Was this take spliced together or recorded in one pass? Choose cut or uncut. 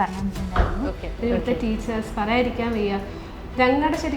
cut